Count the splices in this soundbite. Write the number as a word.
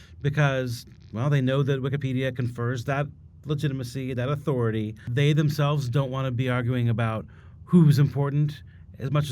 one